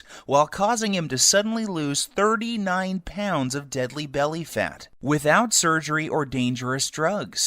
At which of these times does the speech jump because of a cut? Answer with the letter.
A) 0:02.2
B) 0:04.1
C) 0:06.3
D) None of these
C